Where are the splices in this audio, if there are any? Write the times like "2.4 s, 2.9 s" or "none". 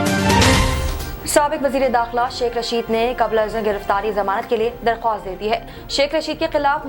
0.9 s